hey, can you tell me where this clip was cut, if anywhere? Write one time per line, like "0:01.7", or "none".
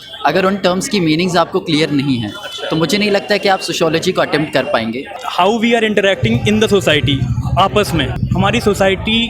0:05.2
0:08.2